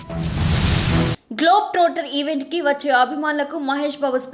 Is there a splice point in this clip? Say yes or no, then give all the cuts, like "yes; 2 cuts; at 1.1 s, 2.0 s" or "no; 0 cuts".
yes; 1 cut; at 1.2 s